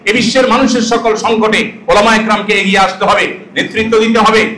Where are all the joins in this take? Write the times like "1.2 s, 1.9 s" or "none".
none